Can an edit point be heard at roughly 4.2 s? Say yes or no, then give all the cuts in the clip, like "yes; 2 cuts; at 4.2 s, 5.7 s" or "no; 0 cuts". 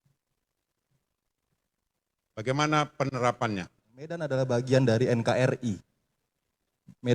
yes; 1 cut; at 4.2 s